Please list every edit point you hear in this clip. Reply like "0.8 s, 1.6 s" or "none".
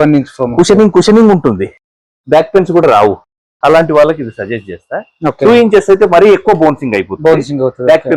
none